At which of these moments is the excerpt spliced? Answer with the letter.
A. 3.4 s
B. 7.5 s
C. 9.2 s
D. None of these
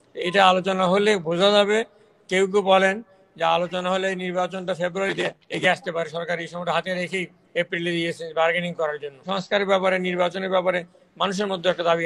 C